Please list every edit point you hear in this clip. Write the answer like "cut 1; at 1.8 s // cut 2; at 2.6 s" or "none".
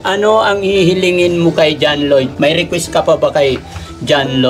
cut 1; at 2.3 s